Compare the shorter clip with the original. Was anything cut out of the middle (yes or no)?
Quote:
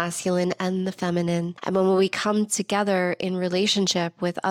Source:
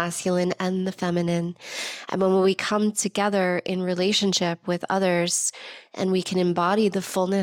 yes